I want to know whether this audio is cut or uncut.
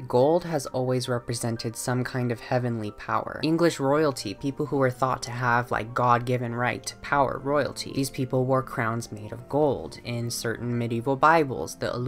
uncut